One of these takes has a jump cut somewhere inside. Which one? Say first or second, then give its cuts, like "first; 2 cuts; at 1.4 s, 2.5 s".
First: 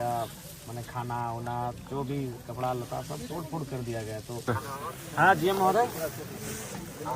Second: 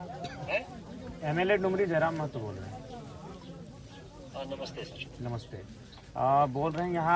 first; 1 cut; at 4.4 s